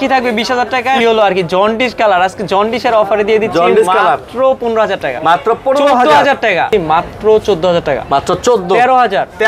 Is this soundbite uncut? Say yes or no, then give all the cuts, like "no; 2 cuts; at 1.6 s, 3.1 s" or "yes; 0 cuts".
no; 2 cuts; at 1.0 s, 6.7 s